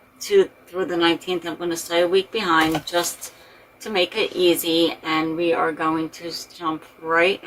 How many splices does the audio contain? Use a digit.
0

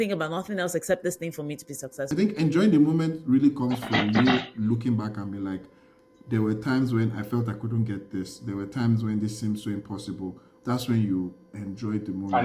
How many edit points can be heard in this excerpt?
1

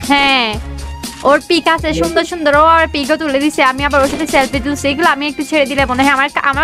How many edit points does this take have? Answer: 0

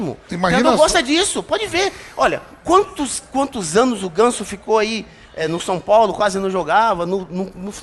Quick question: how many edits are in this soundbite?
0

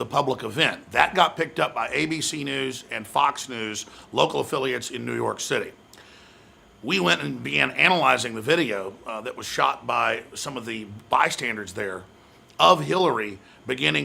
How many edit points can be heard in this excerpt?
1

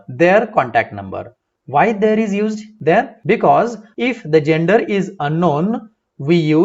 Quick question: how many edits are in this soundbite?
2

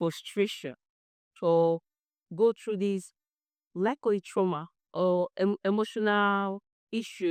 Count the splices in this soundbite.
0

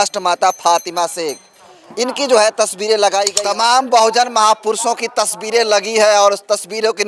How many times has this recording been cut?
1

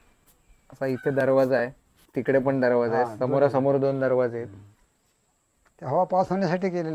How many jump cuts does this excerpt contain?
0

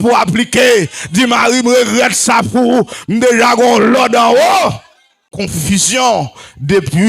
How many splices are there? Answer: 1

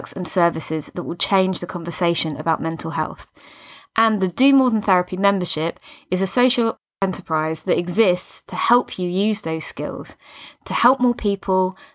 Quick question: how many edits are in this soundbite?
1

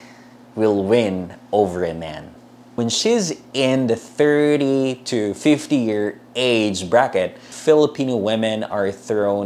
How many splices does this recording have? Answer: 1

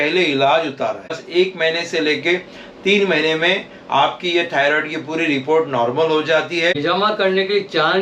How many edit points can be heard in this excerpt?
2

